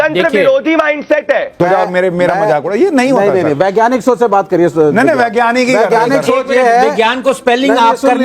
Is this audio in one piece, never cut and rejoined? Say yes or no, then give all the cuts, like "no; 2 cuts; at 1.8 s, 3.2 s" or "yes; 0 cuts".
no; 1 cut; at 1.6 s